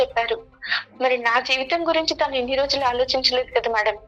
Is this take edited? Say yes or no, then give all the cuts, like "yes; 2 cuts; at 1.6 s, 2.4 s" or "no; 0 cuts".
no; 0 cuts